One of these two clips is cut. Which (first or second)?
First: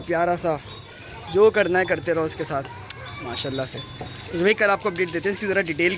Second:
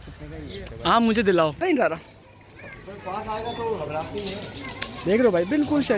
second